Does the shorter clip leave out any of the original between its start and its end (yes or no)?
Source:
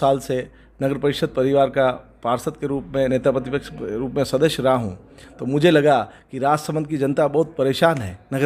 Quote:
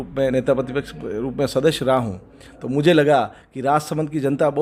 no